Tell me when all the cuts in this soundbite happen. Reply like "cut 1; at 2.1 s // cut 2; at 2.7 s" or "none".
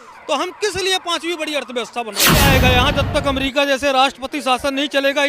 cut 1; at 2.4 s